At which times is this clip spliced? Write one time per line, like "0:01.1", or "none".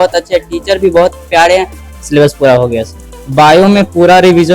0:01.8
0:03.1